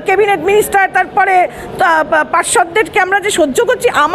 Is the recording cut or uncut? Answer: uncut